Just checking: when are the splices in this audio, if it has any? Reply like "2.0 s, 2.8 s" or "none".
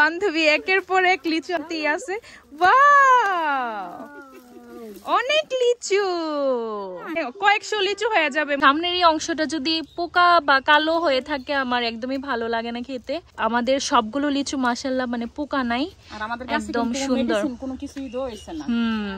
1.7 s, 7.2 s, 8.6 s, 13.3 s

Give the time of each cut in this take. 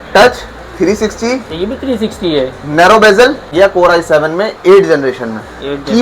3.5 s

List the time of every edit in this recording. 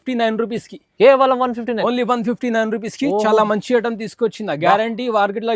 none

